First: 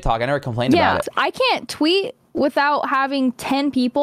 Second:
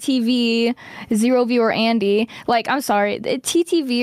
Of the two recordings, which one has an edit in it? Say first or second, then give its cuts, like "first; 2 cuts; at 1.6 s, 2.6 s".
first; 1 cut; at 1.0 s